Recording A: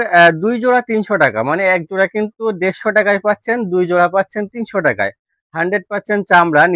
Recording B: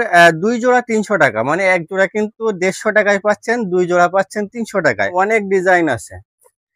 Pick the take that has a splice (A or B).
B